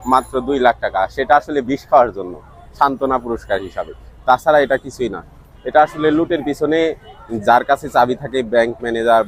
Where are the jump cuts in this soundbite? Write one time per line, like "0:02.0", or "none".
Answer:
none